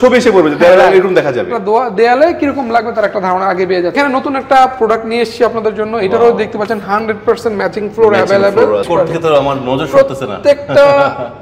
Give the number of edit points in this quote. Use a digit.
2